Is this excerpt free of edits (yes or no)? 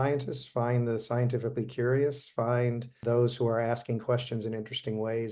no